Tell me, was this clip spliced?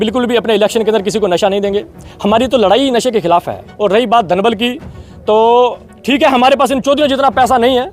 yes; 1 cut; at 3.7 s

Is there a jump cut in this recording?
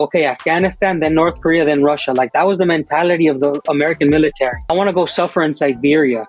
yes; 1 cut; at 4.7 s

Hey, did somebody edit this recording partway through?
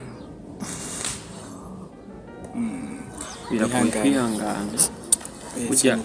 no; 0 cuts

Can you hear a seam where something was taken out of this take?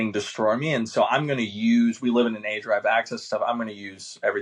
no; 0 cuts

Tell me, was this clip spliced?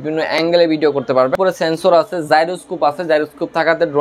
yes; 1 cut; at 1.3 s

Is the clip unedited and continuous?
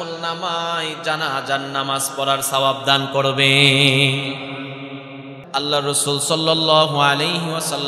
no; 1 cut; at 5.4 s

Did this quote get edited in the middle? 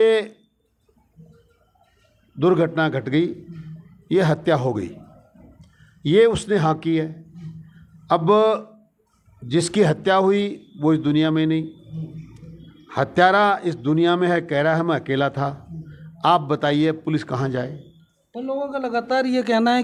no; 0 cuts

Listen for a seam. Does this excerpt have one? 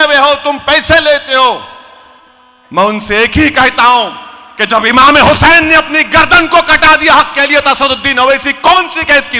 no; 0 cuts

